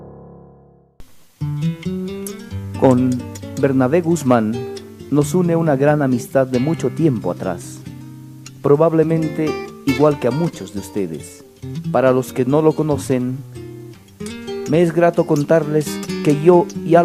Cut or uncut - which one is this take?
cut